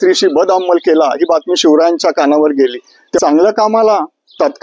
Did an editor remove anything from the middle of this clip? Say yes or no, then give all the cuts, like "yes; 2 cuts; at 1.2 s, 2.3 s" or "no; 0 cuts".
yes; 1 cut; at 3.2 s